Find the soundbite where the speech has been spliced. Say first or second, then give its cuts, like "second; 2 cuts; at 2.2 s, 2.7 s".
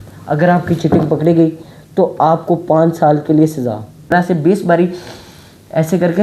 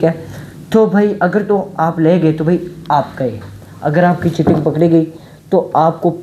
first; 1 cut; at 4.1 s